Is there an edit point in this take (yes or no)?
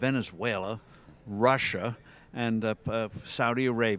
no